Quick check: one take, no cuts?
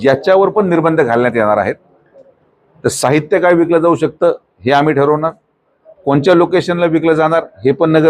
yes; 0 cuts

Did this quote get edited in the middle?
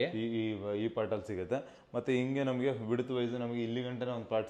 no; 0 cuts

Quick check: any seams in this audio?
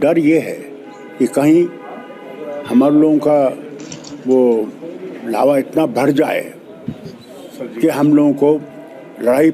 no; 0 cuts

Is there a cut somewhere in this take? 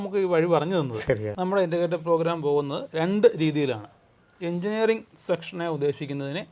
yes; 1 cut; at 1.3 s

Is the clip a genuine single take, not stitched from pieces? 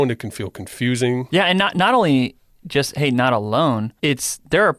no; 2 cuts; at 1.3 s, 3.9 s

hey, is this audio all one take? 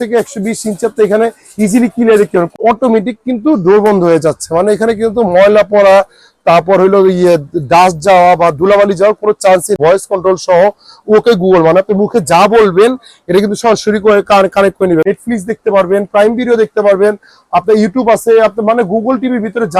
no; 3 cuts; at 2.5 s, 9.8 s, 15.0 s

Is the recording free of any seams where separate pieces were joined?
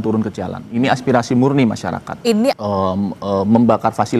no; 1 cut; at 2.6 s

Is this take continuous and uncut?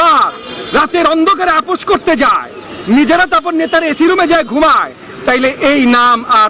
yes; 0 cuts

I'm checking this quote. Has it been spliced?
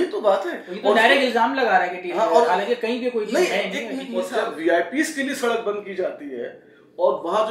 yes; 1 cut; at 3.9 s

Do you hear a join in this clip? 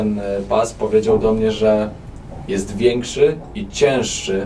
no; 0 cuts

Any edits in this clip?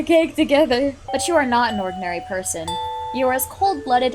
yes; 1 cut; at 1.0 s

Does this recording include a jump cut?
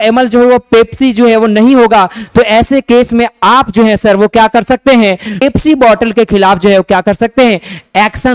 yes; 1 cut; at 5.4 s

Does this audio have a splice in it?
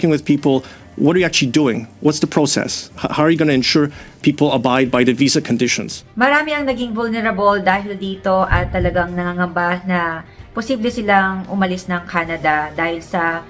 no; 0 cuts

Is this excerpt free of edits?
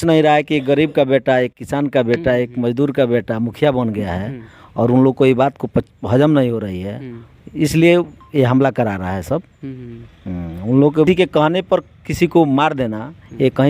no; 1 cut; at 11.1 s

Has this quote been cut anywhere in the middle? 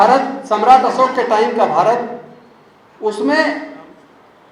no; 0 cuts

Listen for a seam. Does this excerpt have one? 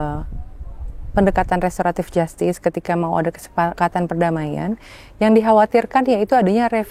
yes; 1 cut; at 3.7 s

